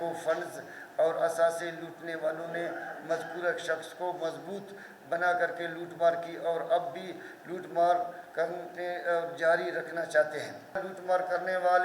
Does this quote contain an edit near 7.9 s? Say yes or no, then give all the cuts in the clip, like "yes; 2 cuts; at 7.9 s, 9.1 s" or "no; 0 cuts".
no; 1 cut; at 10.8 s